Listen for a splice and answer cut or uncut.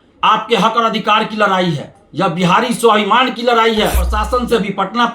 cut